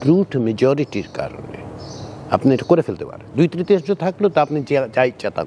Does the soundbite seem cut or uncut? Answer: uncut